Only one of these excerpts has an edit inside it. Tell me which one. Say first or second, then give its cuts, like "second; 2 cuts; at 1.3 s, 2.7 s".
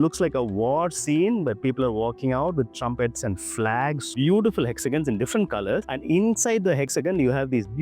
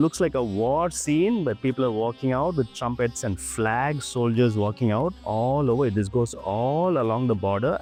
first; 2 cuts; at 4.1 s, 6.9 s